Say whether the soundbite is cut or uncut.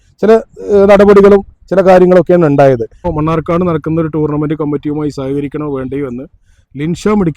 cut